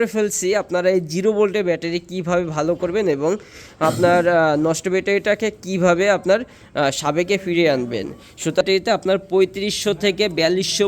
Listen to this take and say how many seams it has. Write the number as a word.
one